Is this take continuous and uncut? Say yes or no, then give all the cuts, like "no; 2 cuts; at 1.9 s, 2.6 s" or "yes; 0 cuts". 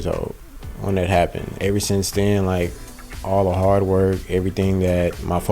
no; 1 cut; at 1.4 s